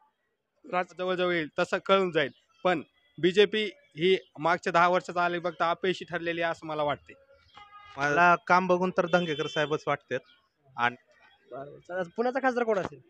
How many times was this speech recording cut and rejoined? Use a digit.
3